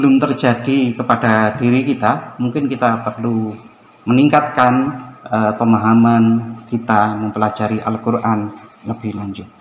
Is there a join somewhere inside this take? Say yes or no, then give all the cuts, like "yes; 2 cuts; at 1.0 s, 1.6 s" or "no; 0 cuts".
no; 0 cuts